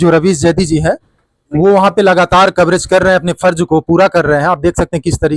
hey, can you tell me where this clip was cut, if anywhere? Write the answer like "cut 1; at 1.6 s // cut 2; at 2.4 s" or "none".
none